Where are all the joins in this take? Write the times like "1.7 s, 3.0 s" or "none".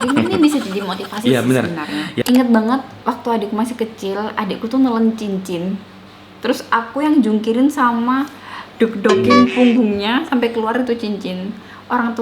2.2 s